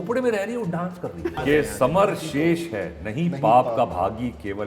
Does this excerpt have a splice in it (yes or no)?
yes